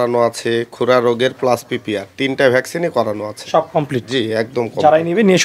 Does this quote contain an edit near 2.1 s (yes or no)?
no